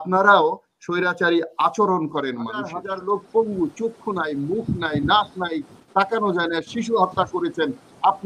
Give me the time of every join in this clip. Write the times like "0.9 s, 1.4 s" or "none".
2.8 s